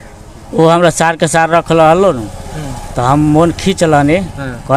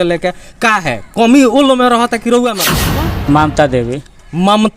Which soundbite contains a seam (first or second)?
second